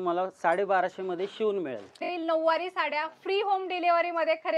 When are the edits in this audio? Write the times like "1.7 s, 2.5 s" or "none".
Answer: 2.1 s